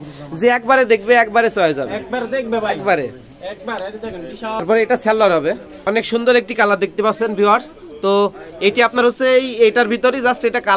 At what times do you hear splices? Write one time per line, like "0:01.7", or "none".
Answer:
0:04.6
0:05.7